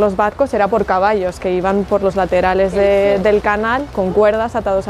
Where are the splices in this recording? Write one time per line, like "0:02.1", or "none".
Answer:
none